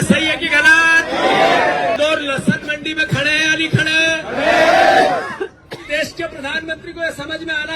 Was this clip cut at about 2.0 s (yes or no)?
yes